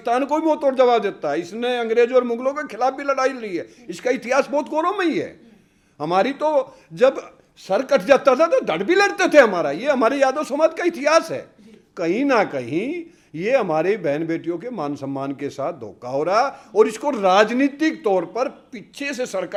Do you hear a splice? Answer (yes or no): no